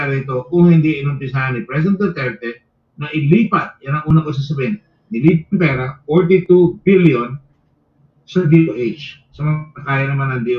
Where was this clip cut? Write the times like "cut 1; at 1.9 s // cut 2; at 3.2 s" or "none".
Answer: none